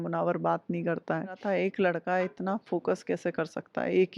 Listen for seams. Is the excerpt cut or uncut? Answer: cut